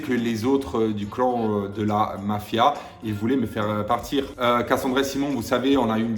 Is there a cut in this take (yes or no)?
yes